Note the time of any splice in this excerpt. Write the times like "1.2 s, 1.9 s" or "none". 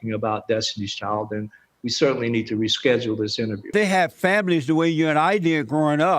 3.7 s